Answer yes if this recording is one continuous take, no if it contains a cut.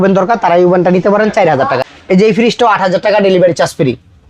no